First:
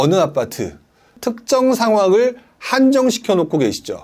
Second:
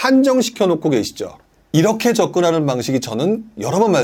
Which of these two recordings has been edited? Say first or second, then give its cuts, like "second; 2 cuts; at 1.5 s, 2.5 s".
first; 1 cut; at 1.2 s